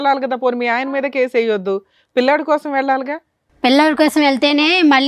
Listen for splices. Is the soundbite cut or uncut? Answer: uncut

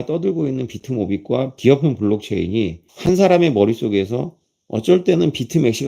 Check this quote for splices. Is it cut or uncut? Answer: cut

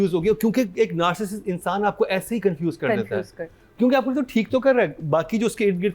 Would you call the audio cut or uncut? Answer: uncut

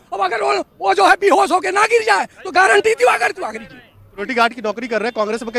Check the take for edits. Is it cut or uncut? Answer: uncut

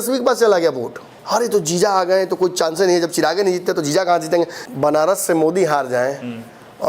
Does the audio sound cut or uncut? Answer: cut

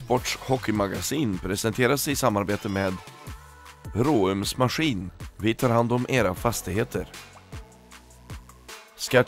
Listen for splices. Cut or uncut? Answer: uncut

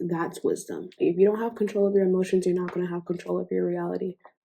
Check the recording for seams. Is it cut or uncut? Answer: cut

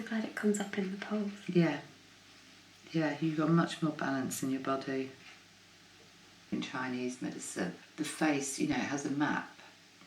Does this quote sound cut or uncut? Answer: cut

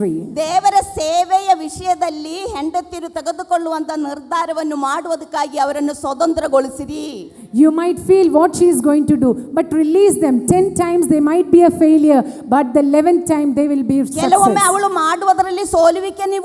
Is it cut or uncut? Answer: uncut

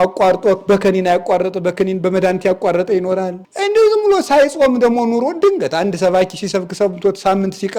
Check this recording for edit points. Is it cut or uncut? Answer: cut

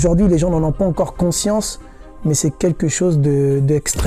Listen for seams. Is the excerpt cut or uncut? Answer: uncut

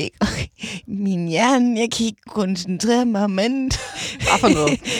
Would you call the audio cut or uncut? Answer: uncut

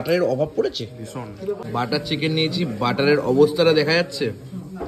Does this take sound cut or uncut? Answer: cut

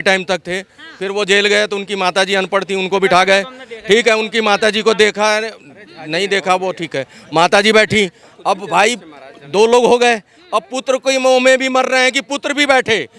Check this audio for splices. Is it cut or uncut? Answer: uncut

